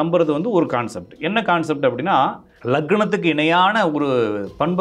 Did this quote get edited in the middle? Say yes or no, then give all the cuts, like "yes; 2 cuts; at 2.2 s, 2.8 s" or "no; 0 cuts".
yes; 1 cut; at 2.5 s